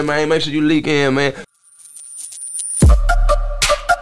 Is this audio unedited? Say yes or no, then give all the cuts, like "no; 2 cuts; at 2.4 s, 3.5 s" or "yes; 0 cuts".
no; 1 cut; at 1.4 s